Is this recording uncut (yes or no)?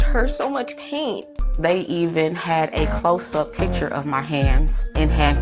no